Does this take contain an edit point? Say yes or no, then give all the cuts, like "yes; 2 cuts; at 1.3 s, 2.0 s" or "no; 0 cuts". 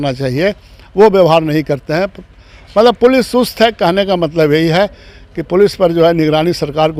no; 0 cuts